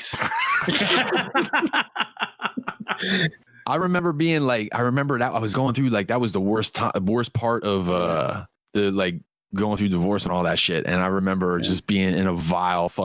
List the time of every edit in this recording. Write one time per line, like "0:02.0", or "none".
none